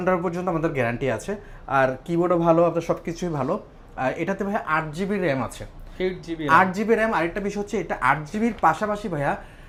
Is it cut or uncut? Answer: uncut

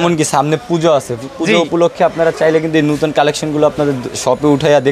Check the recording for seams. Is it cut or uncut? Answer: uncut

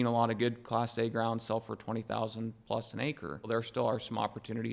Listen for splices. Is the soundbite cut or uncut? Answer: cut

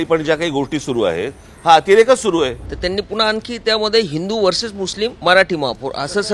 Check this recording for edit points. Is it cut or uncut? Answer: cut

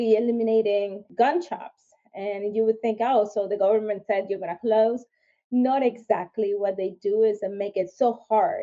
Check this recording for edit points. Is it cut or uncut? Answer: cut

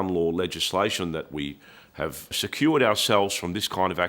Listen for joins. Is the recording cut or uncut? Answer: cut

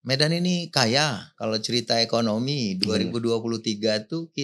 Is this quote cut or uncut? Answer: cut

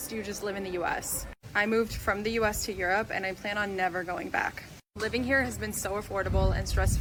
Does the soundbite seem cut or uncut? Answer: uncut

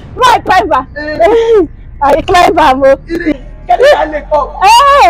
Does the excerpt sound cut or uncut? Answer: cut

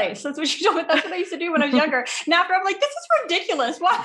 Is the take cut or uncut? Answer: uncut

